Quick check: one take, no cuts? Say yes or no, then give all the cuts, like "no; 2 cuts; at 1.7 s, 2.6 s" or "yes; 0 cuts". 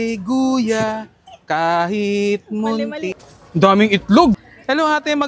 no; 1 cut; at 3.0 s